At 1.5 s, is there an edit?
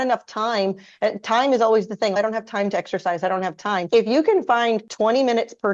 no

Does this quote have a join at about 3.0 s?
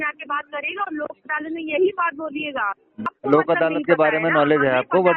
yes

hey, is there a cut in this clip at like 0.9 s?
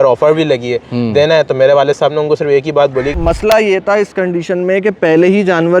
no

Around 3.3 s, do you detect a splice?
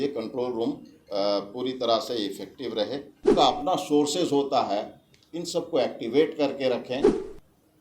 yes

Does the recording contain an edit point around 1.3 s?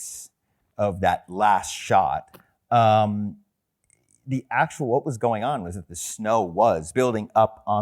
no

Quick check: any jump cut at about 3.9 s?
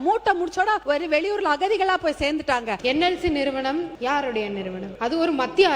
yes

